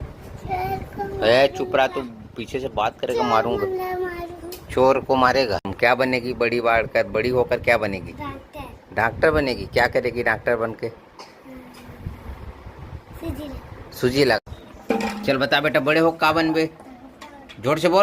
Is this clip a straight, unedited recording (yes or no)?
no